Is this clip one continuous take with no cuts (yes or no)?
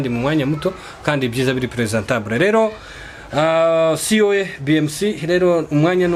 yes